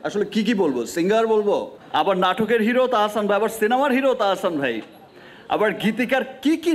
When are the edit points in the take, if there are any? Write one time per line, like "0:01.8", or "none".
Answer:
0:01.8